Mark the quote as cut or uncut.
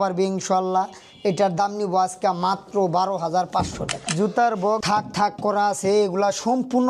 cut